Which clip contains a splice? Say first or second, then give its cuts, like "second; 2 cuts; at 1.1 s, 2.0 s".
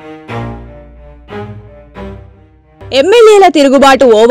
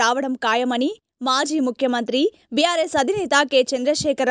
first; 2 cuts; at 1.6 s, 2.2 s